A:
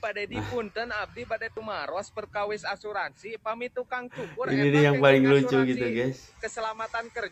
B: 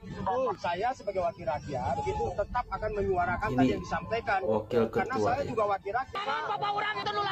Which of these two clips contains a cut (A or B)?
B